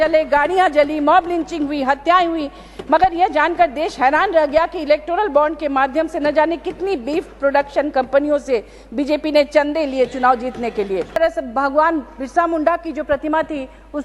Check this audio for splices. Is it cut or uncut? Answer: cut